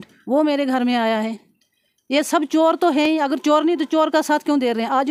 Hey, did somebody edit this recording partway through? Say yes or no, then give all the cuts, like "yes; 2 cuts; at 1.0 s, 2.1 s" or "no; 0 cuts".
no; 0 cuts